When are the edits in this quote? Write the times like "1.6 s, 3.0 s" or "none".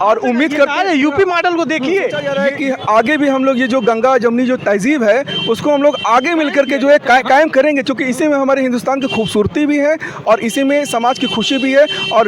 2.3 s